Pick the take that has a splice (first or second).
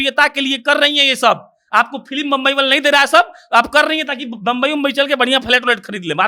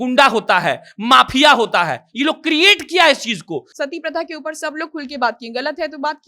second